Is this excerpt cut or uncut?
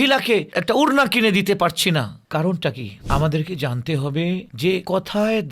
cut